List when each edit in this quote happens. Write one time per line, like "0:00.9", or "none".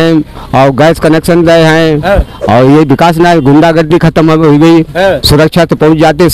0:05.2